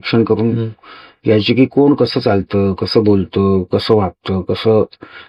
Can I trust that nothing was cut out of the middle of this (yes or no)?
yes